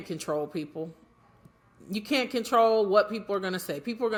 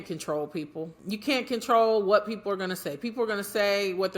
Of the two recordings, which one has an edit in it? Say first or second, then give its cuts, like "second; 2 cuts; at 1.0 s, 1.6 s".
second; 1 cut; at 1.0 s